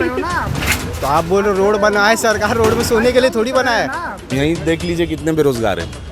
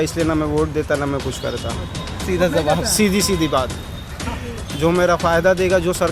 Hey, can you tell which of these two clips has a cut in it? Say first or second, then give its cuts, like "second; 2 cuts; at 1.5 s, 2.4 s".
first; 1 cut; at 4.3 s